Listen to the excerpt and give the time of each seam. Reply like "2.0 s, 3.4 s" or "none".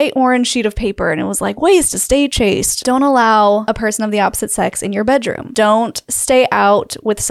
2.7 s, 3.6 s, 5.4 s